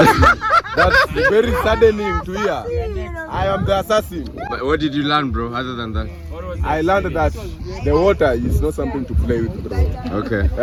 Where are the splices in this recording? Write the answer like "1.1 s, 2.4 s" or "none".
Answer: none